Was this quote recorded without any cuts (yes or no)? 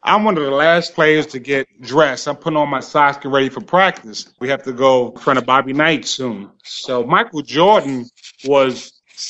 no